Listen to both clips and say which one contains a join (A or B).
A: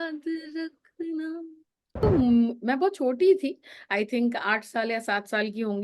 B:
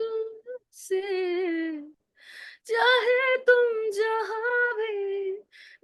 A